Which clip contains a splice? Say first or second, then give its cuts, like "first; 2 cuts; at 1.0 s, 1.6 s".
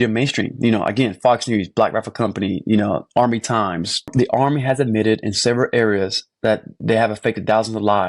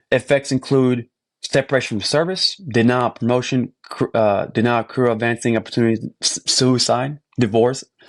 first; 1 cut; at 4.1 s